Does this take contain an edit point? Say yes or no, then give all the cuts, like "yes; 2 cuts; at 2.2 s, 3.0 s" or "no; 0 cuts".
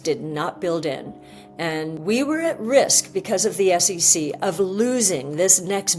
yes; 1 cut; at 2.0 s